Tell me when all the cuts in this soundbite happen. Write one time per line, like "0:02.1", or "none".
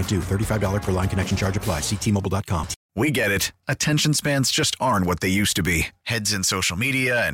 0:02.8